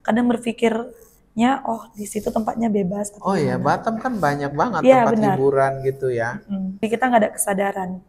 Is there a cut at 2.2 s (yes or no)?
no